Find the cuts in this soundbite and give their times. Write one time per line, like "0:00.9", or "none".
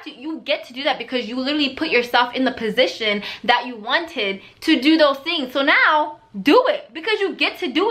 none